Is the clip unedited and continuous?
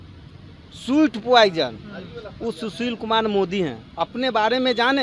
yes; 0 cuts

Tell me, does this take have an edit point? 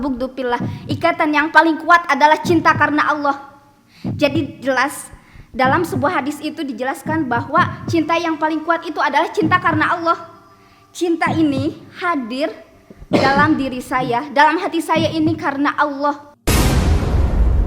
yes; 1 cut; at 16.3 s

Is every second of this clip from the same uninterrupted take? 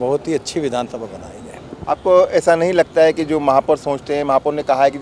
yes; 0 cuts

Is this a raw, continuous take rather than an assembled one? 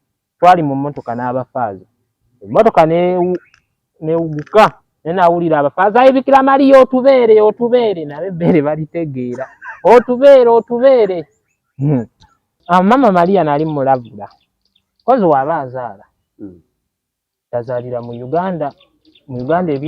no; 1 cut; at 12.5 s

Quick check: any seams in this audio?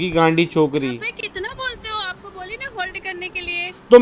yes; 1 cut; at 1.1 s

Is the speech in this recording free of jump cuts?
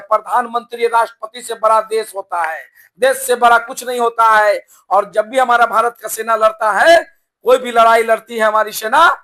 yes; 0 cuts

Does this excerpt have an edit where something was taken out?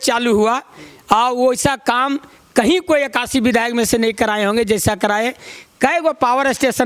no; 0 cuts

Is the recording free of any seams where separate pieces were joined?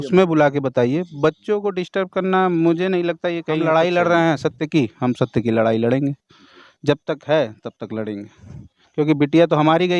no; 1 cut; at 3.6 s

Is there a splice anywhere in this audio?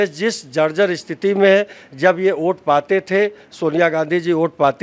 no; 0 cuts

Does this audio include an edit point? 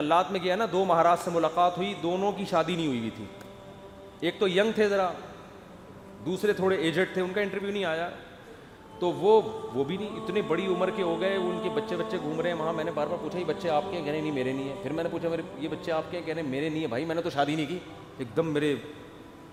no; 0 cuts

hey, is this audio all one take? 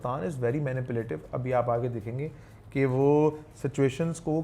yes; 0 cuts

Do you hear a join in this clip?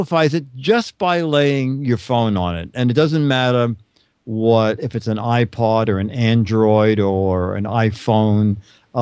yes; 1 cut; at 5.5 s

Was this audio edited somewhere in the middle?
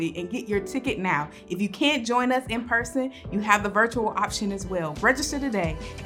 yes; 1 cut; at 4.9 s

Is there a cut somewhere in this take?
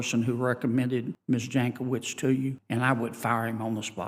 yes; 2 cuts; at 1.1 s, 2.6 s

